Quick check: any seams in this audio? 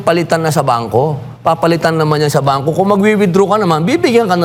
no; 0 cuts

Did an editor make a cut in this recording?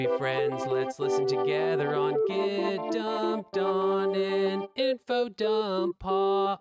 no; 0 cuts

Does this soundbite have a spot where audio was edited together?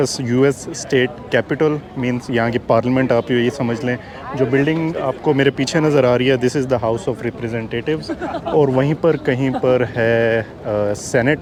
no; 0 cuts

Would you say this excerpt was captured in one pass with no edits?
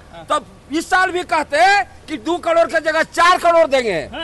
yes; 0 cuts

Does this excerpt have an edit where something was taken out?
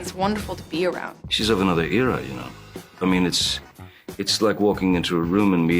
yes; 1 cut; at 1.2 s

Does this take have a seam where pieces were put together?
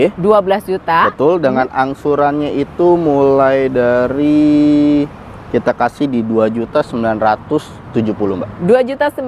no; 0 cuts

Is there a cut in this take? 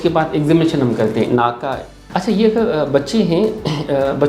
yes; 1 cut; at 2.0 s

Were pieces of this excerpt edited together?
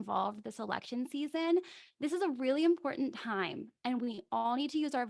no; 0 cuts

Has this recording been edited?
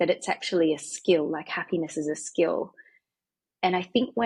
no; 0 cuts

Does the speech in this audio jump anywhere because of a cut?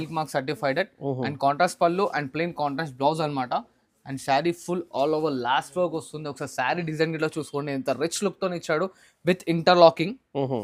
no; 0 cuts

